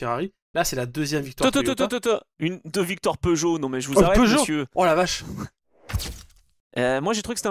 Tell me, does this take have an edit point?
yes; 1 cut; at 6.1 s

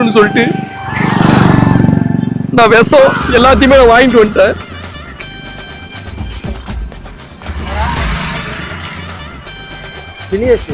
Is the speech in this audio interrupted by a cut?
no; 0 cuts

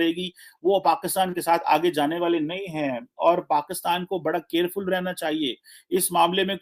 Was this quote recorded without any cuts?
yes; 0 cuts

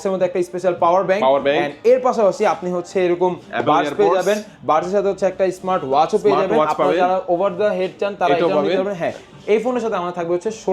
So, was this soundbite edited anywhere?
no; 0 cuts

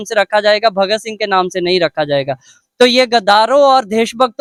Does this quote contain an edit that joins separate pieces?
no; 0 cuts

